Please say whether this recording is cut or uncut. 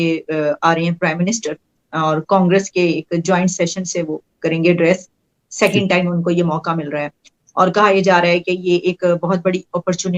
uncut